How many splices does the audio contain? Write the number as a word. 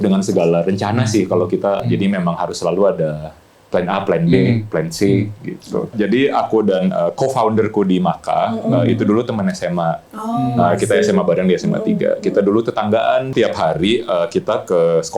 three